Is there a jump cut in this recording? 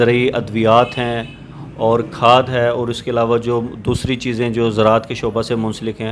no; 0 cuts

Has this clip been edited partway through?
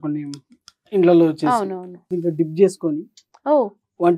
yes; 1 cut; at 2.1 s

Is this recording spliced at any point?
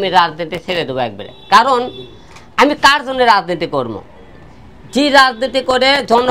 no; 0 cuts

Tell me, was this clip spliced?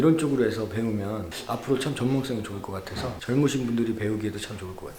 no; 0 cuts

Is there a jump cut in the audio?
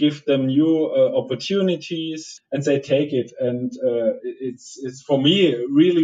yes; 1 cut; at 2.3 s

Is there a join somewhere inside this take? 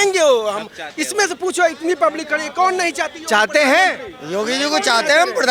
no; 0 cuts

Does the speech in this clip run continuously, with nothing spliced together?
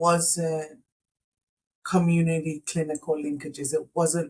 yes; 0 cuts

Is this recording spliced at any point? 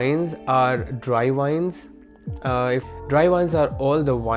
yes; 1 cut; at 2.8 s

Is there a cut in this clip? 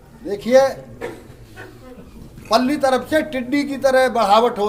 no; 0 cuts

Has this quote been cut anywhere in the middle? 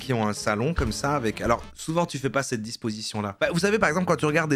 no; 0 cuts

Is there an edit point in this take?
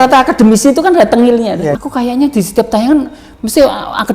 yes; 1 cut; at 1.8 s

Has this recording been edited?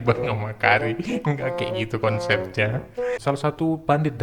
yes; 1 cut; at 3.2 s

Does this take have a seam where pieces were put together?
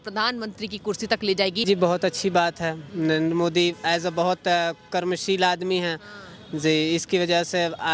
yes; 1 cut; at 1.6 s

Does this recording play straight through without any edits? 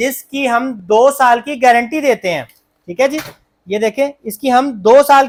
yes; 0 cuts

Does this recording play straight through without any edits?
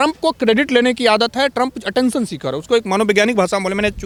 yes; 0 cuts

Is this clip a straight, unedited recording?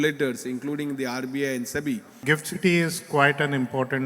no; 1 cut; at 2.2 s

